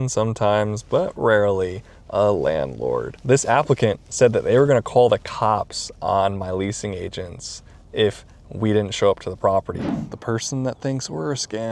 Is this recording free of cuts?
no; 1 cut; at 9.8 s

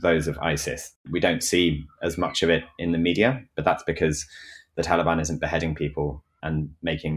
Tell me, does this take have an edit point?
yes; 2 cuts; at 1.0 s, 6.4 s

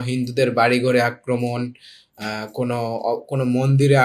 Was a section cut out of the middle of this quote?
no; 0 cuts

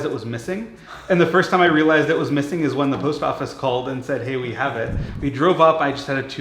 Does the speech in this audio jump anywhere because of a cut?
yes; 1 cut; at 5.0 s

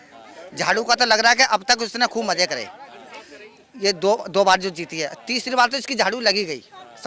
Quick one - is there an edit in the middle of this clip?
no; 0 cuts

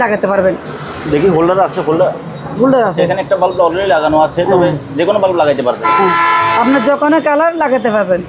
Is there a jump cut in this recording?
no; 0 cuts

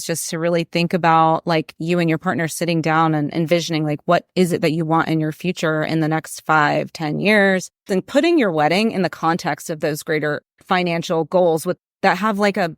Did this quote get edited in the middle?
yes; 2 cuts; at 7.9 s, 10.6 s

